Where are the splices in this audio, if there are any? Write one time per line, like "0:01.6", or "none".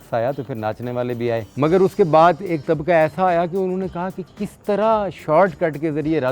0:01.5